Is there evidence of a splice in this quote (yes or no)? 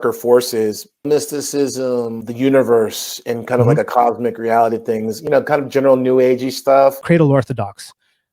yes